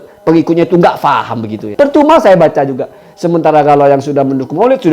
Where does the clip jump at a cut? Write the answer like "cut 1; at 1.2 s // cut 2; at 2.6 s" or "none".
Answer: cut 1; at 1.7 s